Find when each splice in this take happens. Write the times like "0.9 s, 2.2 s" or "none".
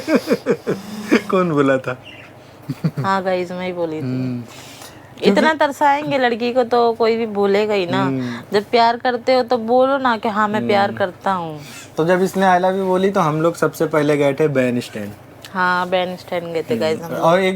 none